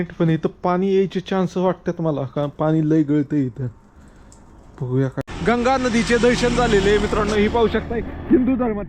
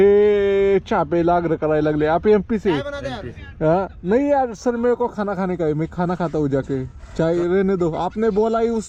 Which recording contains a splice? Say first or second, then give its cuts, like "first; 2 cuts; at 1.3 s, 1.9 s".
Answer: first; 1 cut; at 5.3 s